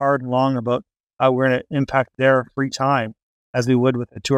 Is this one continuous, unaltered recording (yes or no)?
no